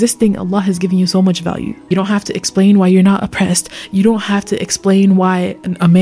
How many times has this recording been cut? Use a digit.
1